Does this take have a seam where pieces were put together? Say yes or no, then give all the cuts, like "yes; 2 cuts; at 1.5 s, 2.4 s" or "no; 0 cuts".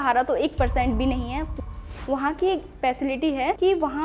yes; 1 cut; at 1.6 s